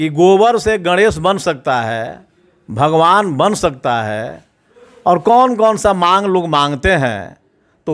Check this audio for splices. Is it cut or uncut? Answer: uncut